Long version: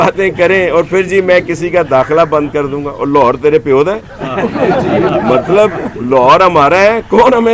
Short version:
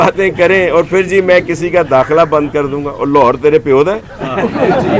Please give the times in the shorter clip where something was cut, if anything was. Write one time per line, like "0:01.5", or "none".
none

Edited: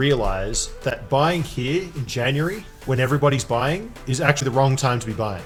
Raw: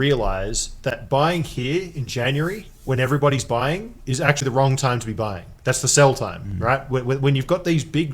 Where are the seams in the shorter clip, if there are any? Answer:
none

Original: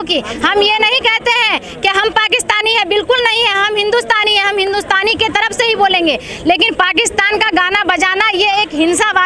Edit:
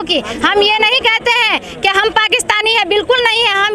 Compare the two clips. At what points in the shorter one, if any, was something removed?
none

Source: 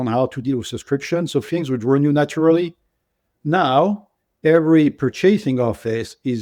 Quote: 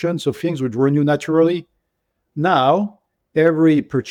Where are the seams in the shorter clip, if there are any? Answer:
none

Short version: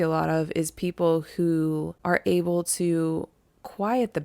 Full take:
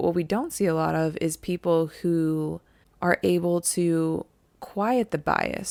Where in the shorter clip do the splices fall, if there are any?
0:01.9

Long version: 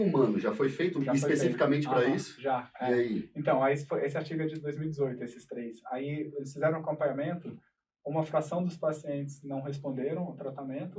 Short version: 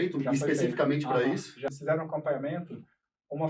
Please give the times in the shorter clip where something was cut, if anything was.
0:01.7

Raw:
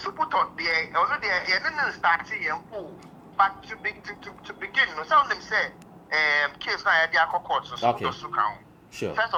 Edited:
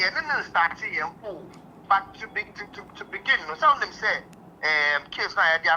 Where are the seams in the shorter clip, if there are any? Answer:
none

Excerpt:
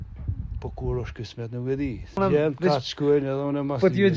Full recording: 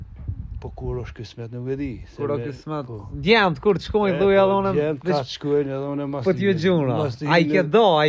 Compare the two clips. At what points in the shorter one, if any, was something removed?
0:02.2

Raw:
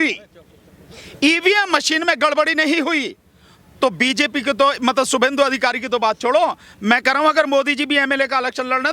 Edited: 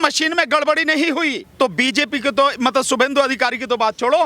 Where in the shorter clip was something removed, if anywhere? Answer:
0:01.4

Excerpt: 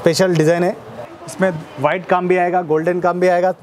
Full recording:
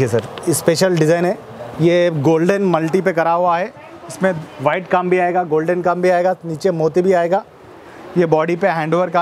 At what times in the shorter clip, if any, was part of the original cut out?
0:01.0

